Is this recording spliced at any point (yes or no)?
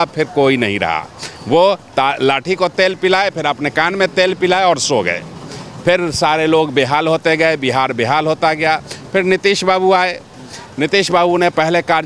no